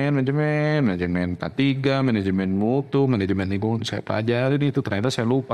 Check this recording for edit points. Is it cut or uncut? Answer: uncut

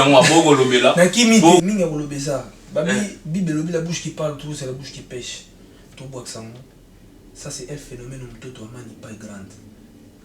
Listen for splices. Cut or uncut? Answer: cut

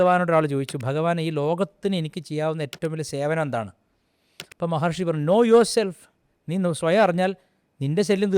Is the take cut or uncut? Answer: uncut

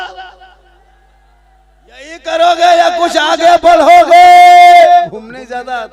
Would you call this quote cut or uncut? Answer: cut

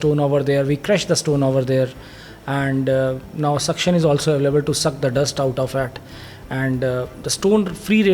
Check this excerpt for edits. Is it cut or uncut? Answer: uncut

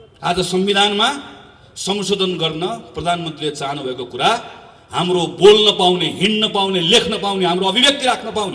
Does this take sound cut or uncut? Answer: uncut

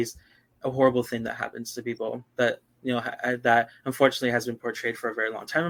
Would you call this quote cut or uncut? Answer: uncut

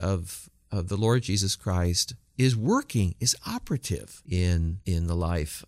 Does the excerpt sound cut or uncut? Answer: cut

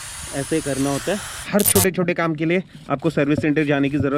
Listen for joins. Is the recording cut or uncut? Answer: cut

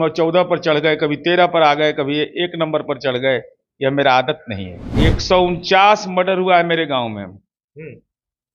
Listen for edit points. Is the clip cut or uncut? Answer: cut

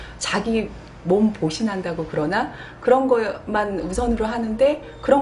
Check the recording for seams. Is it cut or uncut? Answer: cut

